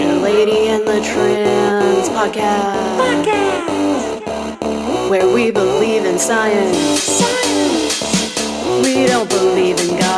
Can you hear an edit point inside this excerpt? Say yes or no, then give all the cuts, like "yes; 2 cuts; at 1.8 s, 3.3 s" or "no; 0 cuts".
no; 0 cuts